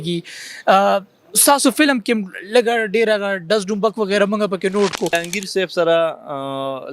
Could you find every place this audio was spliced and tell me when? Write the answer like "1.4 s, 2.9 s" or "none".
5.2 s